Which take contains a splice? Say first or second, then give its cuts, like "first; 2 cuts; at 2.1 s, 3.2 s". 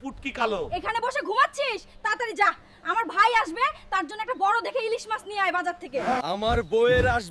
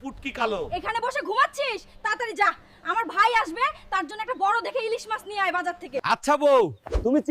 second; 1 cut; at 6.0 s